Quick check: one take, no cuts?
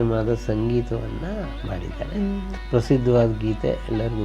no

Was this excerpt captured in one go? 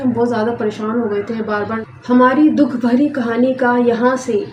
no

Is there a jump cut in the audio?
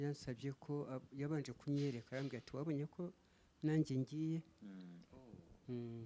no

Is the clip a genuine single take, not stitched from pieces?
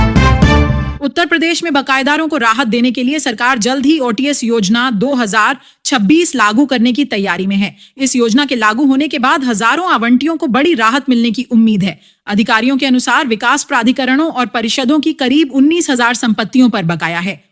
no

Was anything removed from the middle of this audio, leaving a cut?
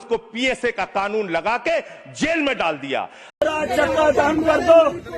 yes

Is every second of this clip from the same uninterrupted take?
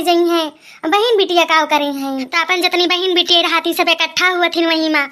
no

